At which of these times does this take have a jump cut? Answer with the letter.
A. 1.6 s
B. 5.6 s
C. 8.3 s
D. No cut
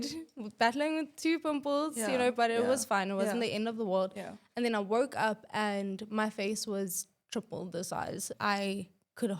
C